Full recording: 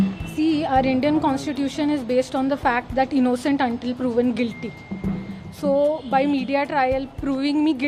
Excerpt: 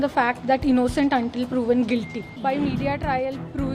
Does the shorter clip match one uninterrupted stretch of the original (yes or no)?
no